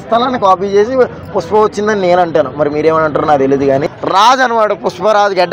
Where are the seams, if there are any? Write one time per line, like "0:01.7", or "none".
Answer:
0:03.8